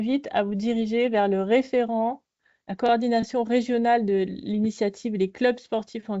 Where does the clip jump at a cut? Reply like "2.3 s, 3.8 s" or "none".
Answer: none